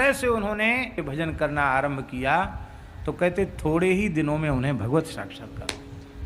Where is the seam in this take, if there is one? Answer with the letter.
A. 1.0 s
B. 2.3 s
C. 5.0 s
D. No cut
A